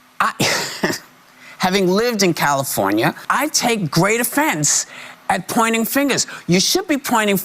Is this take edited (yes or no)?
yes